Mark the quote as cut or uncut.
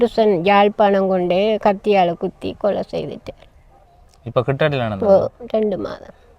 uncut